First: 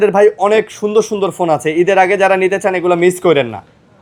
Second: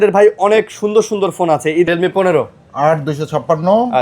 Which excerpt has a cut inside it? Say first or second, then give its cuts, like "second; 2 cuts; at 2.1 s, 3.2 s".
second; 1 cut; at 1.9 s